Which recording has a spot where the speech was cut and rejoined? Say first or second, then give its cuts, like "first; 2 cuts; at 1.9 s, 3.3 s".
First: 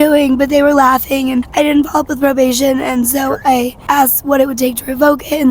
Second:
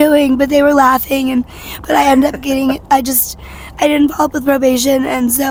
first; 2 cuts; at 1.5 s, 3.8 s